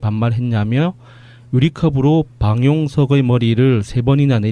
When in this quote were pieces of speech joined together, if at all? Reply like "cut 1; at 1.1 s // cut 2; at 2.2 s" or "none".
cut 1; at 3.3 s